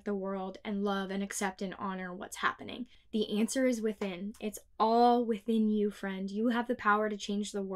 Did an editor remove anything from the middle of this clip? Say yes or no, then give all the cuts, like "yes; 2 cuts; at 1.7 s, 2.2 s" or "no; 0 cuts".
yes; 1 cut; at 2.9 s